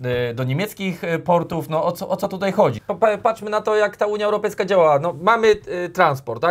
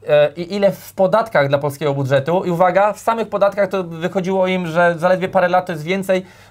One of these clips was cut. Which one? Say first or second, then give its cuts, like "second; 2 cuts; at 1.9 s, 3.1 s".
first; 1 cut; at 2.8 s